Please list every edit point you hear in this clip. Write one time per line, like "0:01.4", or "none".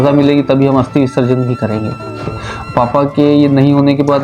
0:02.2

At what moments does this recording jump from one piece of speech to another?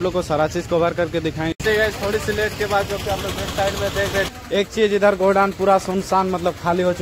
0:01.5
0:04.3

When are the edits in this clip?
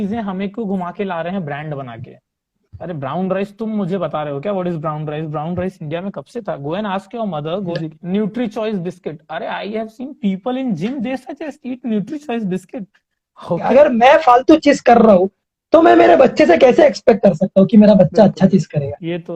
0:07.8
0:13.7

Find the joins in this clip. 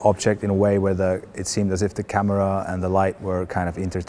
0:03.2

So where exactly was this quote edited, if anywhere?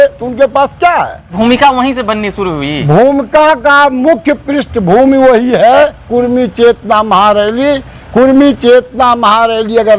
0:01.3

